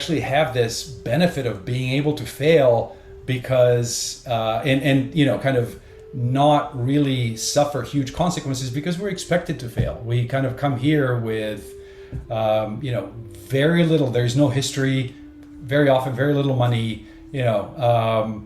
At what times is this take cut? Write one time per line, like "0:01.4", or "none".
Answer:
0:03.0